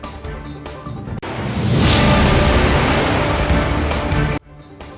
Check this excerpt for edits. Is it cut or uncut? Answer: uncut